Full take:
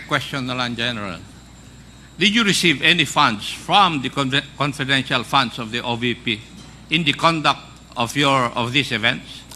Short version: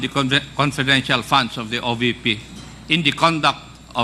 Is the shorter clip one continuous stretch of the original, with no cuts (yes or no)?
yes